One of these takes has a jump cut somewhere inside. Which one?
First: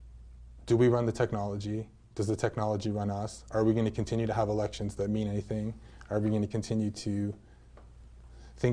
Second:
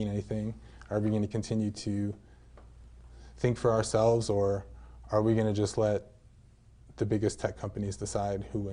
first; 1 cut; at 3.3 s

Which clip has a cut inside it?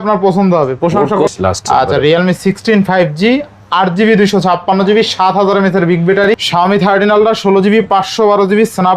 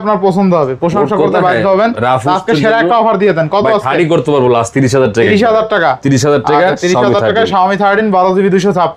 first; 2 cuts; at 1.2 s, 6.2 s

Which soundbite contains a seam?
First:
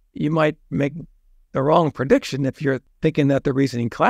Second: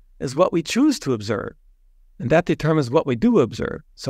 first; 1 cut; at 2.9 s

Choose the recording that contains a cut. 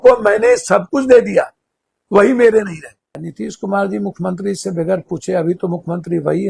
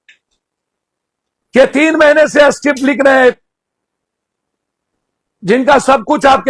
first; 1 cut; at 3.2 s

